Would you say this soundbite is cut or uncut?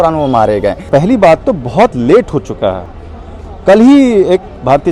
cut